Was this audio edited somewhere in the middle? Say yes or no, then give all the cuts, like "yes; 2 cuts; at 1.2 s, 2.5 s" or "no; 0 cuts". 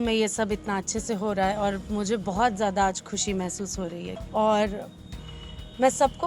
yes; 1 cut; at 4.1 s